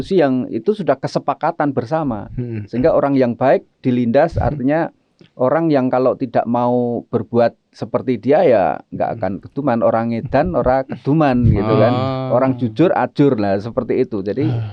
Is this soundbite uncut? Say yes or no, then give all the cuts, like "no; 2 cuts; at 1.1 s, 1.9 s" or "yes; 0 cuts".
yes; 0 cuts